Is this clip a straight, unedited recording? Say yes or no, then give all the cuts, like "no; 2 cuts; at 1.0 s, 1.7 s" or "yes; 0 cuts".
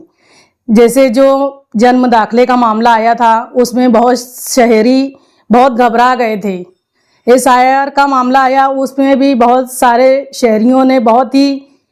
yes; 0 cuts